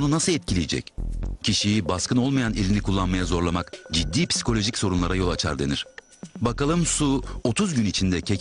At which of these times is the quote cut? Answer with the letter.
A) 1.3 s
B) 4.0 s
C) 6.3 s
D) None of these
C